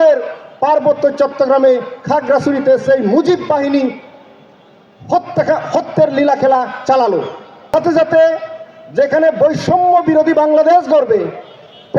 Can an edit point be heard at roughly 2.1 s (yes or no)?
no